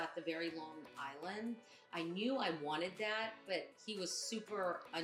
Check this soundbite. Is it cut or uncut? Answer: uncut